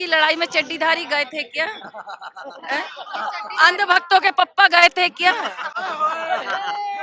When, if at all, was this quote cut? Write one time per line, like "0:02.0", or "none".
none